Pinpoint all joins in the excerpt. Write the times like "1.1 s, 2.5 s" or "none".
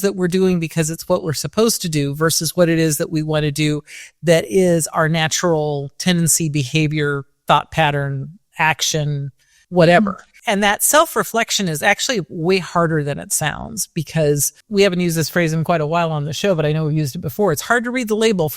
9.6 s, 10.3 s, 14.6 s